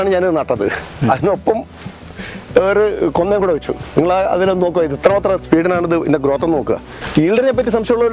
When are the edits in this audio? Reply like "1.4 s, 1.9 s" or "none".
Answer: 6.9 s